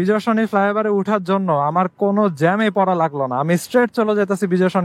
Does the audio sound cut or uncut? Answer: uncut